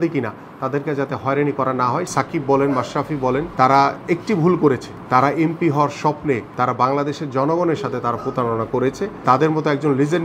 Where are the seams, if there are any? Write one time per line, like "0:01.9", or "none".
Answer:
0:02.1
0:03.5
0:04.9
0:06.5
0:09.2